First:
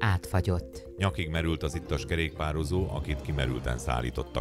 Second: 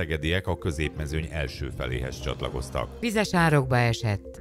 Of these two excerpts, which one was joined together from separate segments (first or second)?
second